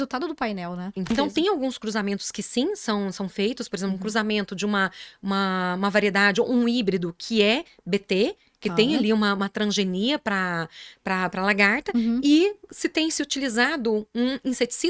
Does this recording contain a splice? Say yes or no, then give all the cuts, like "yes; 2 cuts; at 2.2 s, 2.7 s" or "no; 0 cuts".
yes; 1 cut; at 1.1 s